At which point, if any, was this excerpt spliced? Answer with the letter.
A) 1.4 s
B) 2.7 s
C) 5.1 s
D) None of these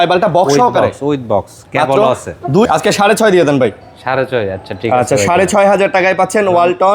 B